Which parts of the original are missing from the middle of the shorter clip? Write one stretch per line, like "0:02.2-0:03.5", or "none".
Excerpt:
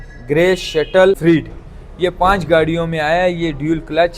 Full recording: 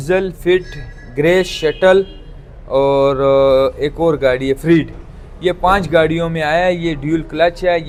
0:02.1-0:04.6

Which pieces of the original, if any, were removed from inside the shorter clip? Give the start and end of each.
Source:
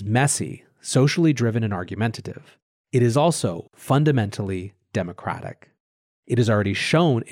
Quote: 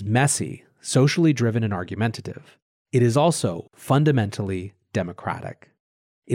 none

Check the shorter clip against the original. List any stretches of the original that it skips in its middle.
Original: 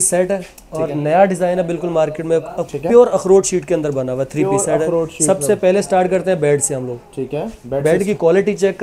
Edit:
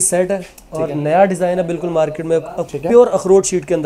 none

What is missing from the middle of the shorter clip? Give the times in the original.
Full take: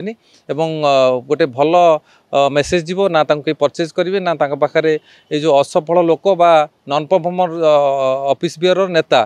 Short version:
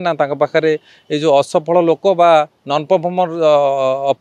none

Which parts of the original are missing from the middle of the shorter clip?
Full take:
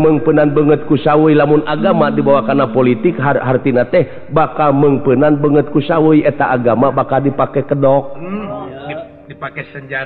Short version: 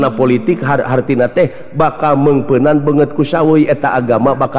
none

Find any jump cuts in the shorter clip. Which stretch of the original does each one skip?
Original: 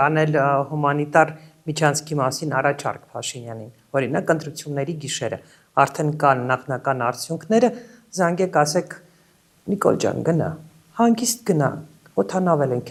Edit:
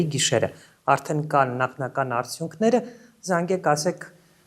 none

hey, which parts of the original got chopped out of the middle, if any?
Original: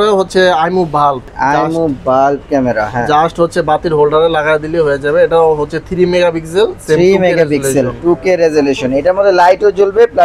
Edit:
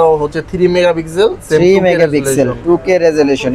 none

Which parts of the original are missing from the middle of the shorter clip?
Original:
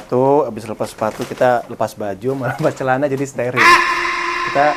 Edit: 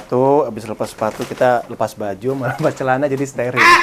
none

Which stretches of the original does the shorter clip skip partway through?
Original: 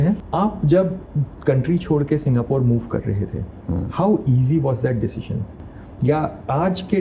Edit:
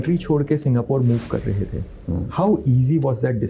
none

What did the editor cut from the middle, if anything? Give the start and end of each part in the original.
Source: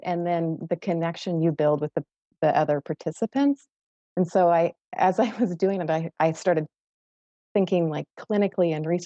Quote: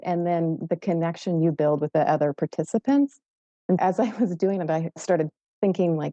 0:01.9-0:02.3
0:04.3-0:05.0
0:06.1-0:06.8

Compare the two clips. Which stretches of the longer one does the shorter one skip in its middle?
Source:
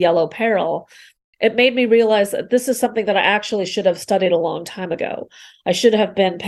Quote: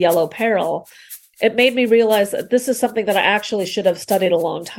none

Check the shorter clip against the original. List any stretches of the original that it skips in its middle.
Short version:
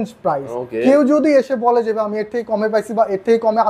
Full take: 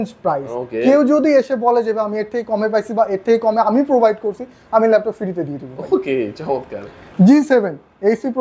none

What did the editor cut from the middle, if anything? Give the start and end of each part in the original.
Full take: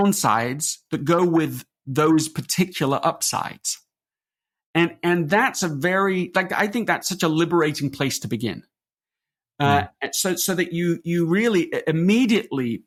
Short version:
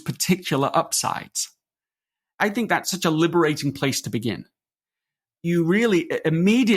0:04.6-0:06.5
0:09.6-0:11.0

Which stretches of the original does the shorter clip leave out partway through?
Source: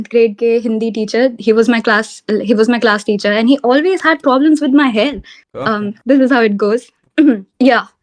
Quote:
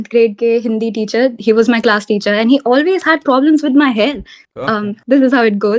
0:01.8-0:02.8

